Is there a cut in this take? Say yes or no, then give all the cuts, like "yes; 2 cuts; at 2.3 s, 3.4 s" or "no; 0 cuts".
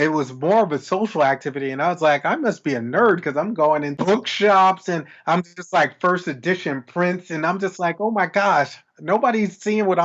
yes; 1 cut; at 3.9 s